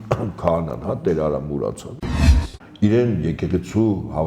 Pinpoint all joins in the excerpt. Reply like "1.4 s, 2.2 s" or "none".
2.2 s